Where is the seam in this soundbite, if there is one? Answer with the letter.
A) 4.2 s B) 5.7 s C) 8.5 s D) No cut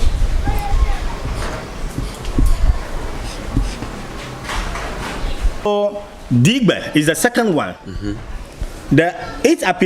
B